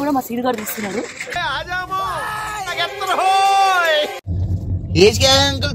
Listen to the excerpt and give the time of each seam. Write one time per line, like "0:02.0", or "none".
0:04.2